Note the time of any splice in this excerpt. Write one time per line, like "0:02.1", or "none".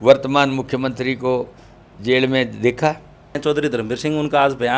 0:03.4

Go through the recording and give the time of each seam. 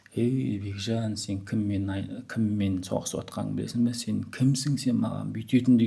none

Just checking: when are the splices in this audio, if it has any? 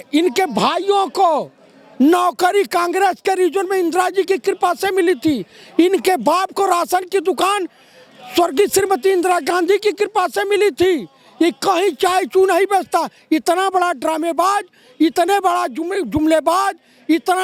none

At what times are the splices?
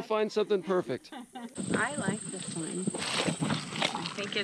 0:01.5

